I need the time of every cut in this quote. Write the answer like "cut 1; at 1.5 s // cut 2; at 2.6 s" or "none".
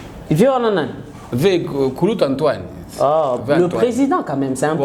none